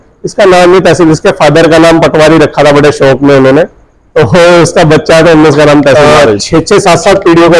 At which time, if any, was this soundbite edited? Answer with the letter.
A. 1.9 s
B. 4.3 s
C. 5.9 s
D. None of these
C